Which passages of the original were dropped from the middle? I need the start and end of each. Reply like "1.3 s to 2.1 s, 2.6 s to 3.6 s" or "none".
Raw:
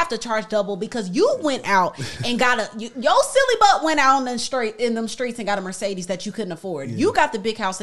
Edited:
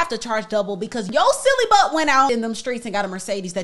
1.0 s to 2.9 s, 4.2 s to 4.8 s